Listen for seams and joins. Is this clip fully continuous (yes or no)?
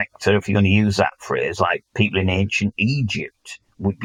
yes